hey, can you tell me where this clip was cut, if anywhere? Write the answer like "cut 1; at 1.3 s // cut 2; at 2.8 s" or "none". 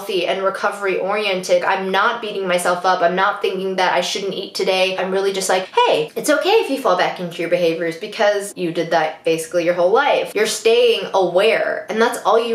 cut 1; at 1.6 s // cut 2; at 5.0 s // cut 3; at 10.3 s